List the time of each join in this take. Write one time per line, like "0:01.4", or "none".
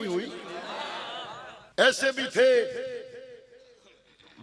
0:01.3